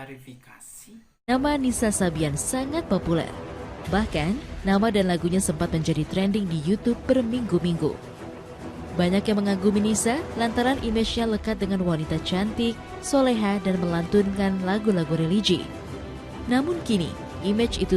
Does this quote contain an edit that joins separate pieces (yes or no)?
yes